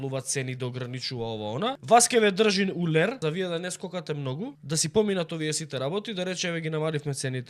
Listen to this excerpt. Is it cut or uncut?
cut